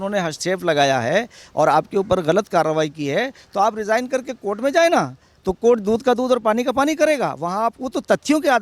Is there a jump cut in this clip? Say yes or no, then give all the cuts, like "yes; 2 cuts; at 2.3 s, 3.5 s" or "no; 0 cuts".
no; 0 cuts